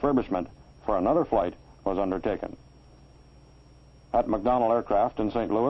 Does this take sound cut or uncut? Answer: uncut